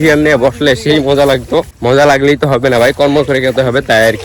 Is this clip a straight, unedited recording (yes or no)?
yes